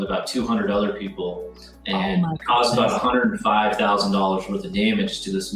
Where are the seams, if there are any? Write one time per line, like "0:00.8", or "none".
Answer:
none